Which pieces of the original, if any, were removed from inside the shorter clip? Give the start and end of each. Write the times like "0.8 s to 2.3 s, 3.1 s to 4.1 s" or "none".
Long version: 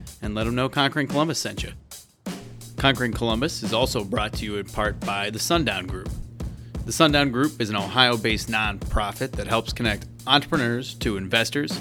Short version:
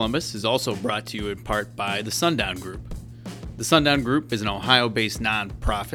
none